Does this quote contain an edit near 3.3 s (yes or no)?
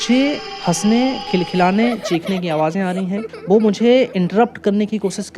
no